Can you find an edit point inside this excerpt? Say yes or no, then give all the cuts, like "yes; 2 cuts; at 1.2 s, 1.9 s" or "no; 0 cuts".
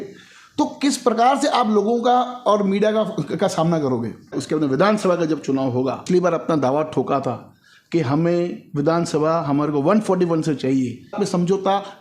yes; 3 cuts; at 4.4 s, 6.0 s, 11.1 s